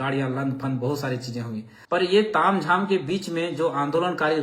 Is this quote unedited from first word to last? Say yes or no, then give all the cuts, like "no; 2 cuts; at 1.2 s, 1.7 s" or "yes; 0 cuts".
no; 1 cut; at 2.0 s